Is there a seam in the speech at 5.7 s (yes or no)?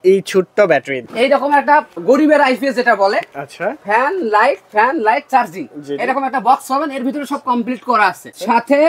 no